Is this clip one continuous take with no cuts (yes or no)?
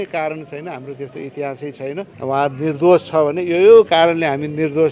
no